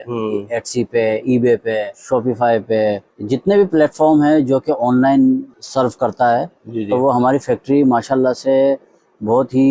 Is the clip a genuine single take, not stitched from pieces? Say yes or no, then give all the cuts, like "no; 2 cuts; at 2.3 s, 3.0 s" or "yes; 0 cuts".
no; 3 cuts; at 2.0 s, 3.1 s, 5.6 s